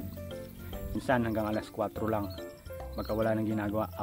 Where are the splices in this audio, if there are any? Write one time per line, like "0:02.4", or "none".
0:01.0